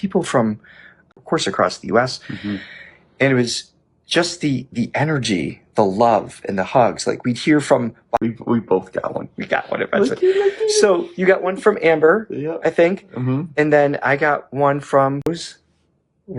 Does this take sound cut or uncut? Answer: cut